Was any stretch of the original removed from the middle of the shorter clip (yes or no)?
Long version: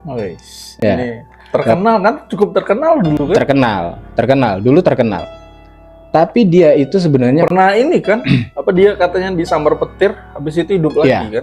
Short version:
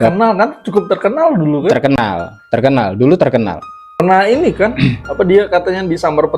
yes